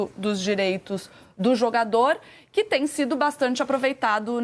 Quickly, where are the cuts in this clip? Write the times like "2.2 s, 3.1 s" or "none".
none